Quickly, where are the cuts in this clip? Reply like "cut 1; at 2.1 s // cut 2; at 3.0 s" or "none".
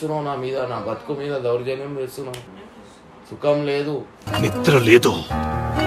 cut 1; at 2.5 s